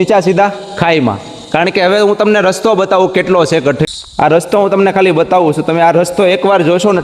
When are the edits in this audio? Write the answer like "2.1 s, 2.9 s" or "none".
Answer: none

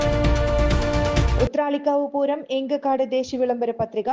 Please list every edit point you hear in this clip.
1.3 s

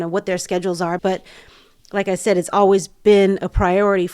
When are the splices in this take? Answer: 1.0 s

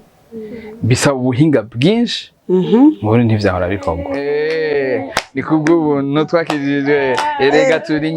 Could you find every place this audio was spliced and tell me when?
4.0 s

